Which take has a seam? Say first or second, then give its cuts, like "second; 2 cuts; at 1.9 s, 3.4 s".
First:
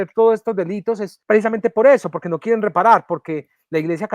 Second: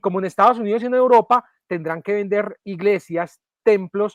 first; 1 cut; at 1.1 s